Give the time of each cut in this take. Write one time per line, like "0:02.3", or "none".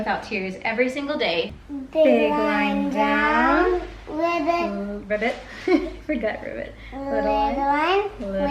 0:01.6